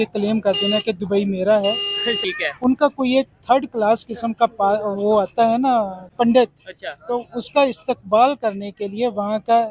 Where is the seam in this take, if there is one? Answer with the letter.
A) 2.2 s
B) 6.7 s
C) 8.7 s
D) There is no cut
A